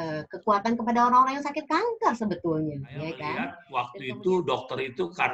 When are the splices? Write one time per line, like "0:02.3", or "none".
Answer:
0:03.6